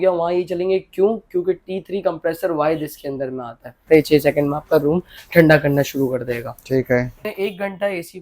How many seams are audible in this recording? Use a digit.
2